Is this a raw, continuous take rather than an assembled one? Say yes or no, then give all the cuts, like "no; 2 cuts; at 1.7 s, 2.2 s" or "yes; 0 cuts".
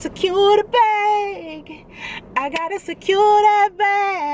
yes; 0 cuts